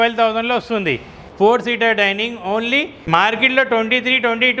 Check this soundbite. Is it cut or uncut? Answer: cut